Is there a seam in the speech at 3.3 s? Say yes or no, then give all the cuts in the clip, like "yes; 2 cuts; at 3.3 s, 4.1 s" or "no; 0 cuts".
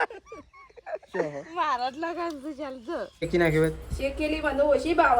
yes; 1 cut; at 3.3 s